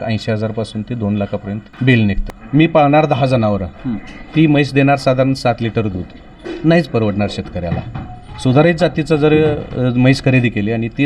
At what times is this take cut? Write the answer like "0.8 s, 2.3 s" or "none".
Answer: 1.7 s, 2.2 s